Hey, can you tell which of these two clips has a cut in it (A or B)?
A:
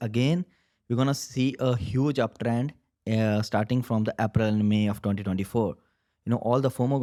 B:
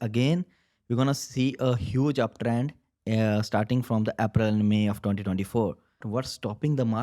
B